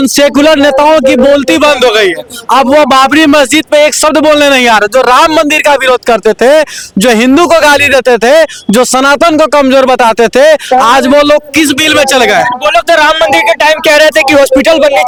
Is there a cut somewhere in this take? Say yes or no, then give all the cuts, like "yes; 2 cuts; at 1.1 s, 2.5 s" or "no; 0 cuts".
no; 0 cuts